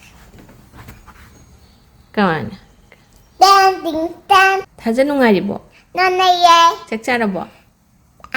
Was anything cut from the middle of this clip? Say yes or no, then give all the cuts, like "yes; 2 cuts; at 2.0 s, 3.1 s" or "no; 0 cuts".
yes; 1 cut; at 4.7 s